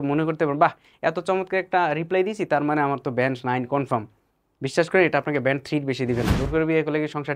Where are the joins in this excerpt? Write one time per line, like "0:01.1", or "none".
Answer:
0:06.3